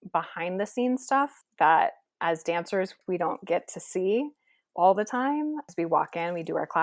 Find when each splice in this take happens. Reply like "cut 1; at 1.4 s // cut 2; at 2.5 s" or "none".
cut 1; at 1.4 s // cut 2; at 2.9 s